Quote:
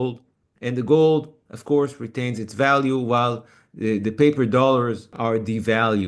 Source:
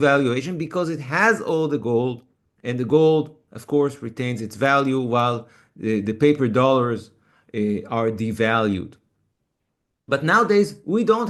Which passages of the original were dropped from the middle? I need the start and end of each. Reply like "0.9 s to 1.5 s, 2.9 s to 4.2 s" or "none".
7.1 s to 7.8 s